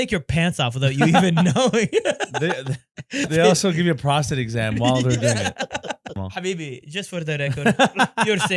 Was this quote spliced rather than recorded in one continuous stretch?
yes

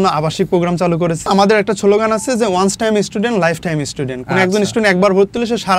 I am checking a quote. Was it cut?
yes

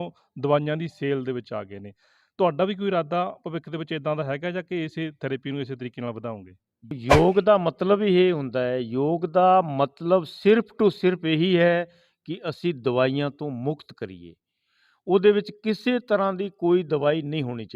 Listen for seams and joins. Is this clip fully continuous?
no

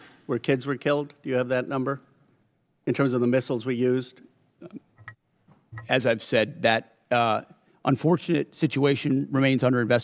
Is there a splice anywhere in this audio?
yes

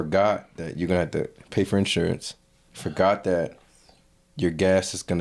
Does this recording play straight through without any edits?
yes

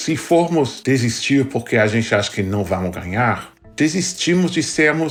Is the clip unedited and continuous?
yes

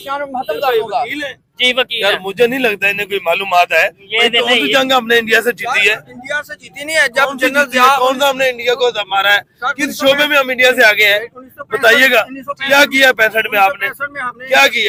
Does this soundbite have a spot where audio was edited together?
no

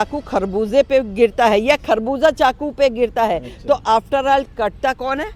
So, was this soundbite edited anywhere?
no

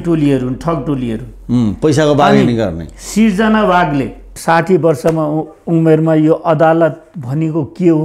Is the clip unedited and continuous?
no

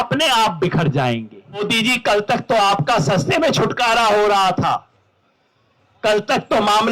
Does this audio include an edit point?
yes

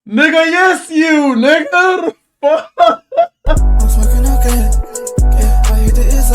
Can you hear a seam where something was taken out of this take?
yes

